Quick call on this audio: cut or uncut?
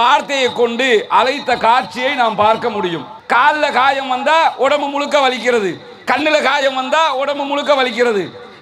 cut